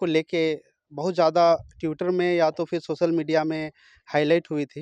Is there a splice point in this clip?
no; 0 cuts

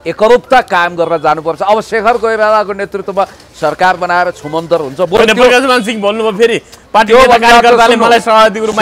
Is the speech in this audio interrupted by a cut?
no; 0 cuts

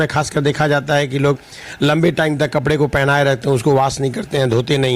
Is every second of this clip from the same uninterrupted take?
yes; 0 cuts

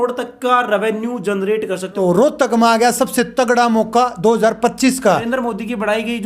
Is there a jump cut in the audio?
yes; 2 cuts; at 1.9 s, 5.2 s

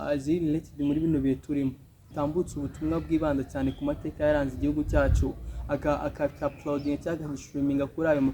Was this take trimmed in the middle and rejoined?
yes; 1 cut; at 2.0 s

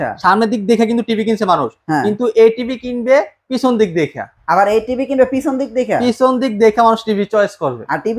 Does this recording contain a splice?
no; 0 cuts

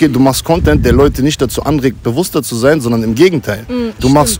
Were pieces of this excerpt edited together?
no; 0 cuts

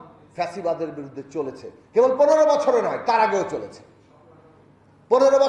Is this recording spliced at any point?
no; 0 cuts

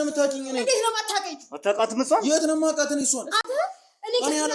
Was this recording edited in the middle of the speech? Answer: no; 0 cuts

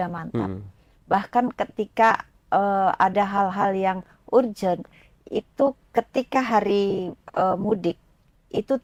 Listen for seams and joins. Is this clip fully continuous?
yes; 0 cuts

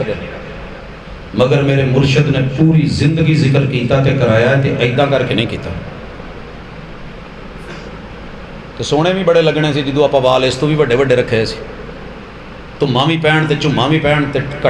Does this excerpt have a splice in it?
no; 0 cuts

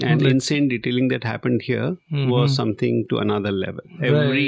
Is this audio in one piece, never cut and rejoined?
yes; 0 cuts

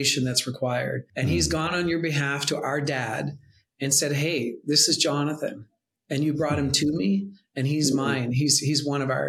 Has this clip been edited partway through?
yes; 1 cut; at 1.1 s

